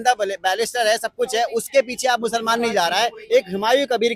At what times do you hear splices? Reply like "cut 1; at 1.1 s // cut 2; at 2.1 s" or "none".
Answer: none